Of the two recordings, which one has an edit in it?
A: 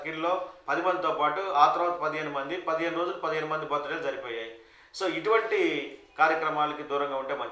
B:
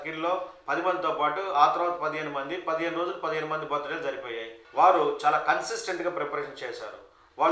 B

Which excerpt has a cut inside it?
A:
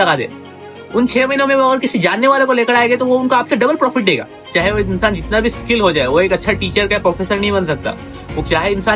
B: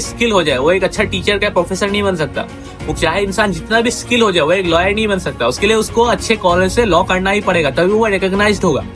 A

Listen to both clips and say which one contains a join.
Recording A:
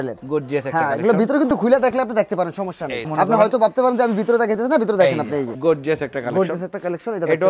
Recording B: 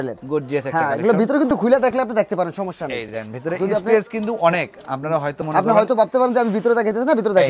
A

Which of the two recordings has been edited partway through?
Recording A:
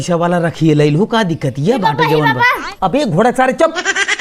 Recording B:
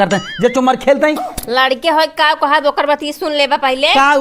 B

